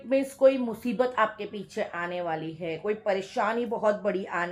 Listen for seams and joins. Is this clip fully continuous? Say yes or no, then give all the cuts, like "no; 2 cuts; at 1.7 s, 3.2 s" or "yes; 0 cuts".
yes; 0 cuts